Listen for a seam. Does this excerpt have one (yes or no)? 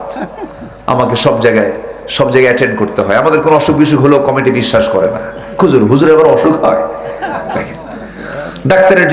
no